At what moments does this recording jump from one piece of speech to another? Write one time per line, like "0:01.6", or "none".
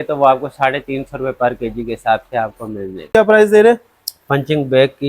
0:03.1